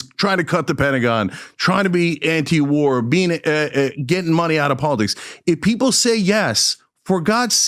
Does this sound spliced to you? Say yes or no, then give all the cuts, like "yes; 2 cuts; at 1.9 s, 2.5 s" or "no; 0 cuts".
no; 0 cuts